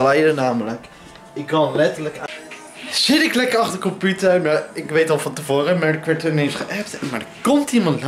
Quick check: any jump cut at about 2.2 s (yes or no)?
yes